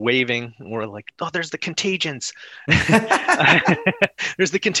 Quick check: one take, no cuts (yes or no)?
yes